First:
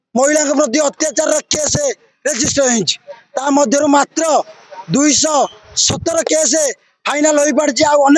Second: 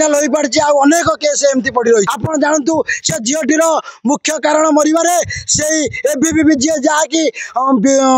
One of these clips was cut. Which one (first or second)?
second